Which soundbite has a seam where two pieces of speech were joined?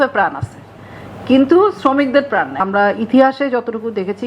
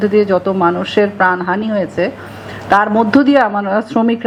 first; 1 cut; at 2.6 s

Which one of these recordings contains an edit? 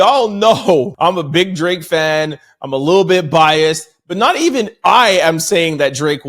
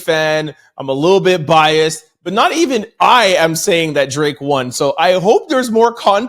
first; 1 cut; at 0.9 s

